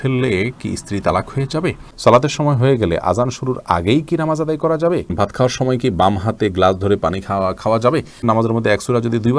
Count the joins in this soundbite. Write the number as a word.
three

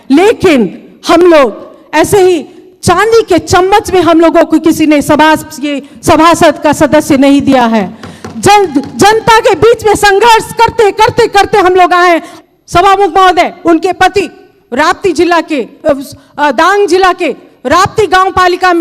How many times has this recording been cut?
one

